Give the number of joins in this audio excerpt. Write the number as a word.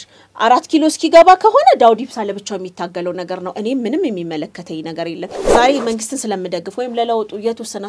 one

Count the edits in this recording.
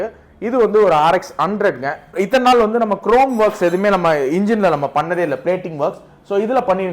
one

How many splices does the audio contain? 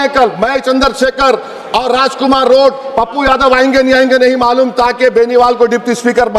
zero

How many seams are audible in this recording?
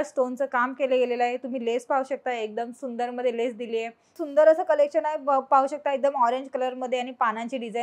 one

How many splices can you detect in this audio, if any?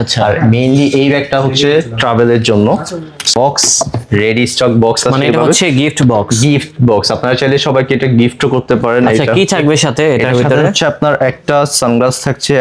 one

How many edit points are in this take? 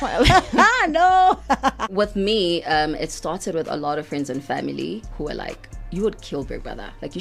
one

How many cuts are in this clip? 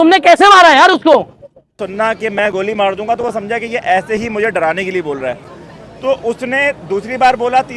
one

